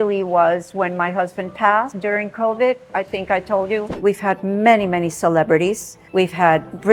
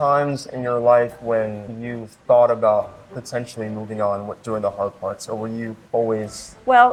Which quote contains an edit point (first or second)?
first